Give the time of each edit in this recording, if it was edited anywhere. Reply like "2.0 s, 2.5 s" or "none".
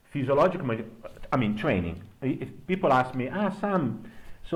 none

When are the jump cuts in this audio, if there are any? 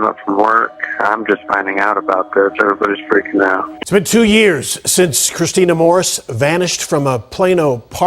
3.7 s

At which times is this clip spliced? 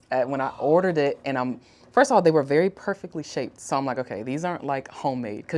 none

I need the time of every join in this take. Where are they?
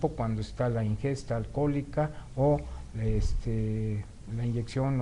2.9 s

